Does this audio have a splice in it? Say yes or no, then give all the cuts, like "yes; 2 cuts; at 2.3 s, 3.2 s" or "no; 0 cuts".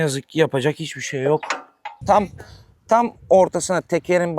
yes; 1 cut; at 2.0 s